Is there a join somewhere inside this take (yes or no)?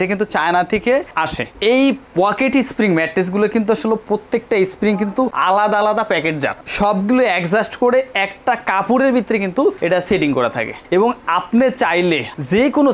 no